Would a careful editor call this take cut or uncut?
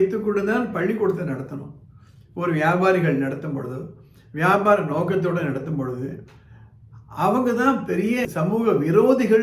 cut